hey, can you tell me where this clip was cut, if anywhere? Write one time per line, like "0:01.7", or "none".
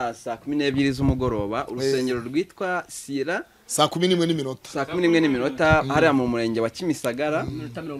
none